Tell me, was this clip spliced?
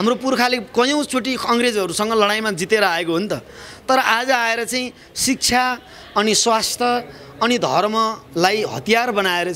no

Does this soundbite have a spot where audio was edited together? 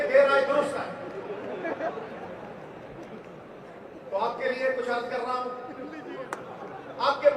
no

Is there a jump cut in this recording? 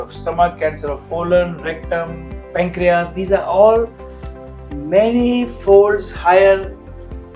no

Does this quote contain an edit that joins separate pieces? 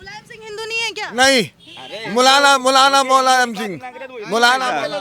no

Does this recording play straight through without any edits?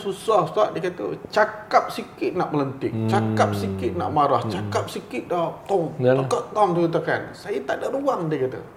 yes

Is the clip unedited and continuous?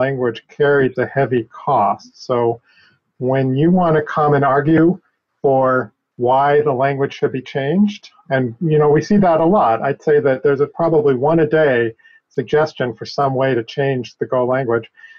yes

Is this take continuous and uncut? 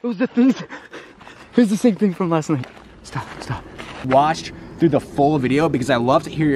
no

